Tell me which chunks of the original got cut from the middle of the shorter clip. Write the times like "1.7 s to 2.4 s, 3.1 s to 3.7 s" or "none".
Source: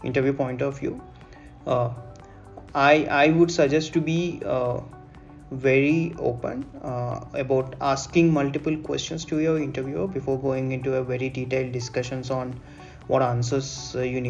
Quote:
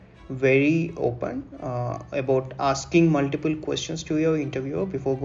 none